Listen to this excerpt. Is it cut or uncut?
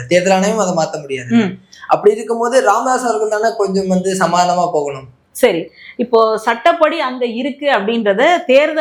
uncut